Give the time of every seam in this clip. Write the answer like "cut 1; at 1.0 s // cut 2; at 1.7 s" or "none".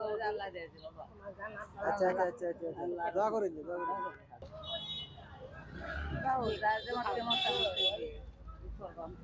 cut 1; at 4.6 s